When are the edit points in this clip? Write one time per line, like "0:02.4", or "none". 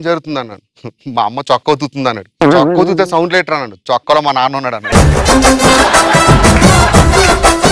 none